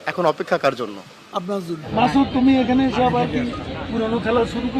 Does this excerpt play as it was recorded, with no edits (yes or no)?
no